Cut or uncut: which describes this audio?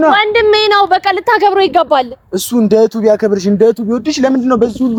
uncut